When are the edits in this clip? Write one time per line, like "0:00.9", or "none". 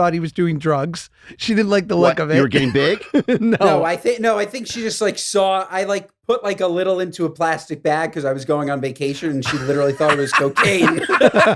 none